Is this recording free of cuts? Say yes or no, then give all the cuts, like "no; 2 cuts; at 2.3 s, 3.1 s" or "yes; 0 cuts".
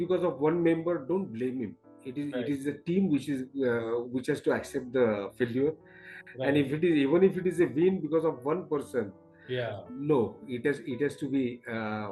yes; 0 cuts